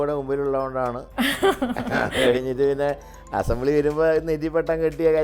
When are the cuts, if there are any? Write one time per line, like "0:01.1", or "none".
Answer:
0:01.0